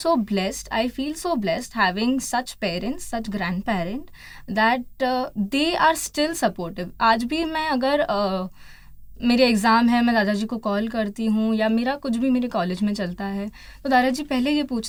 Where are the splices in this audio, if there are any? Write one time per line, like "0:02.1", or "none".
none

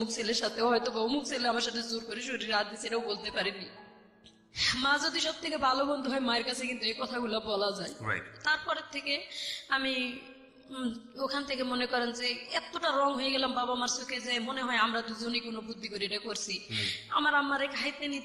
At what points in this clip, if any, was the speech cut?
none

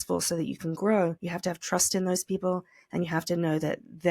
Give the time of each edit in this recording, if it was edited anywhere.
0:01.3

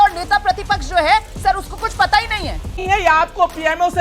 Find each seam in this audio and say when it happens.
0:02.7

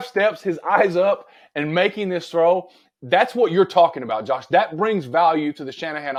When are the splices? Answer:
none

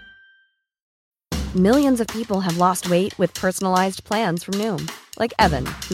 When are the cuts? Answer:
0:00.9

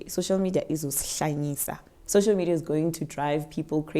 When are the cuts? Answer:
none

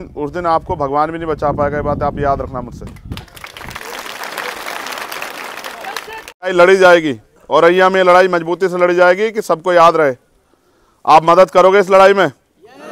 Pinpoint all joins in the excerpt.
0:06.5

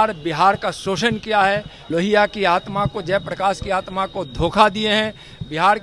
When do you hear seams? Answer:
0:01.7

